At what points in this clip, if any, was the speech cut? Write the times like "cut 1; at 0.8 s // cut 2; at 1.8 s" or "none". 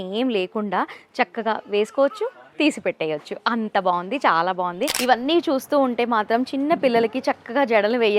cut 1; at 4.9 s